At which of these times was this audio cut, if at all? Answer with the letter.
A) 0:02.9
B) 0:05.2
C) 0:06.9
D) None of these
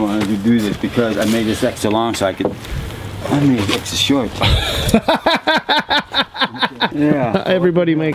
C